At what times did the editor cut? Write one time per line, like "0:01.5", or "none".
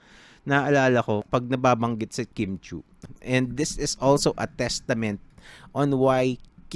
0:01.2
0:02.9